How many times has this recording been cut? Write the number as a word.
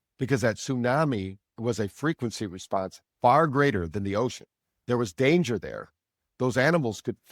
one